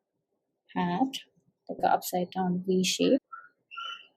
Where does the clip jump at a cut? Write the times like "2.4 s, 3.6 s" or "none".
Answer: 3.2 s